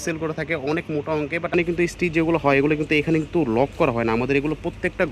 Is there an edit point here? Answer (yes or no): yes